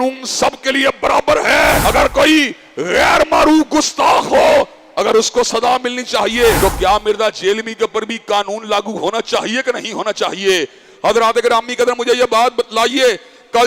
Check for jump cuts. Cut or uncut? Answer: cut